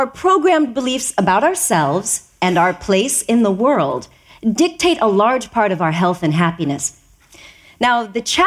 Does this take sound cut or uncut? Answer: cut